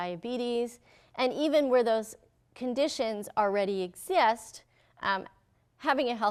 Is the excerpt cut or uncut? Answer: uncut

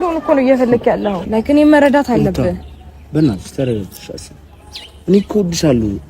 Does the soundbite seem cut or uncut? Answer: cut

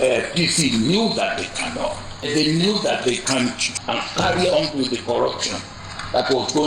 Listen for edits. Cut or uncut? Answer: cut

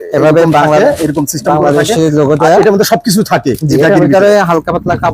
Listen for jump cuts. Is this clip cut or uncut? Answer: uncut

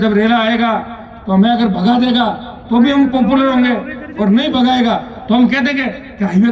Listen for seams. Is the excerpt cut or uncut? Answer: uncut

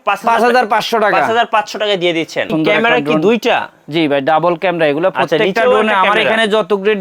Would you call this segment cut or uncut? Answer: cut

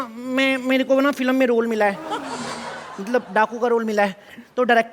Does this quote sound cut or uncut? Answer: uncut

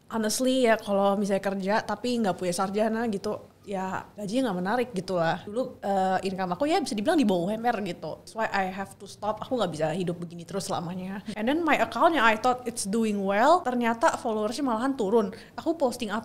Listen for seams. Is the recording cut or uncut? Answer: cut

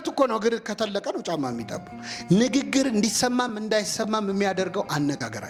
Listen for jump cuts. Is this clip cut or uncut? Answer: uncut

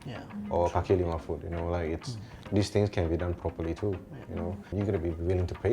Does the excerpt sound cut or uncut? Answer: cut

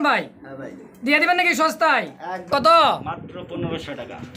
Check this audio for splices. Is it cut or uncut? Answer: cut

